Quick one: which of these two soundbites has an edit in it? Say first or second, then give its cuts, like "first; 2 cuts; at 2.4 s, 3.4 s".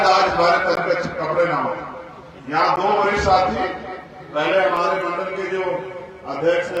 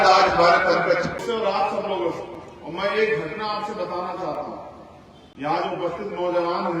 second; 1 cut; at 1.2 s